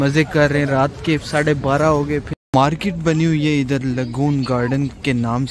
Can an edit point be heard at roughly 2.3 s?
yes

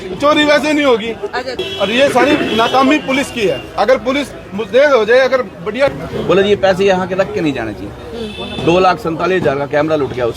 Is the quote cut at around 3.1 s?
no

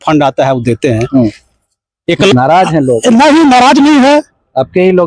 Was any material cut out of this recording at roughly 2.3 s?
yes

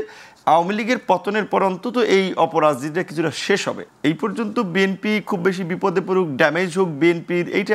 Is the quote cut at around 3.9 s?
yes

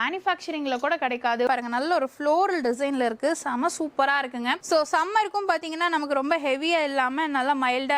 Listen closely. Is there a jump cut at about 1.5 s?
yes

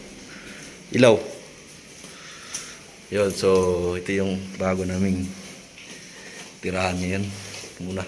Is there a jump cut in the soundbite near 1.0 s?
no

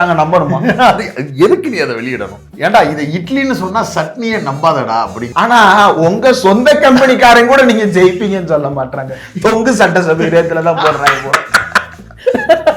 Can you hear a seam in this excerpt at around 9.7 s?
no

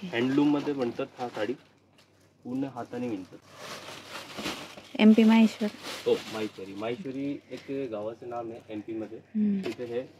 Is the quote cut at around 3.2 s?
no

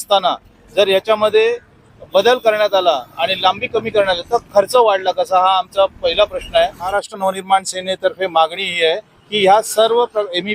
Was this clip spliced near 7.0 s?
yes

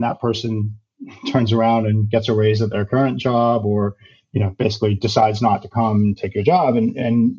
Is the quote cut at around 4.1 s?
no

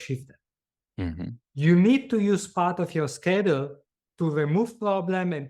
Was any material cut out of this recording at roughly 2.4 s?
no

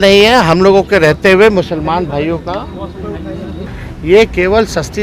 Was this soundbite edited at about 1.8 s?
no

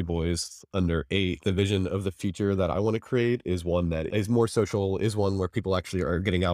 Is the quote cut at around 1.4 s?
yes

